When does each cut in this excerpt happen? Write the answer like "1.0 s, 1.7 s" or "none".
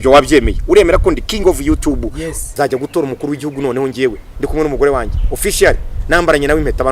2.4 s